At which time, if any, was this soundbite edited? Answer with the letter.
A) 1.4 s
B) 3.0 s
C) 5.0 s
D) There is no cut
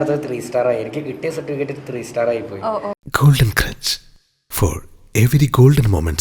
B